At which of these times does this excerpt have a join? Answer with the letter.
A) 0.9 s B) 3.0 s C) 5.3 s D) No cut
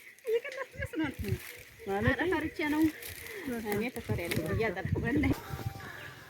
C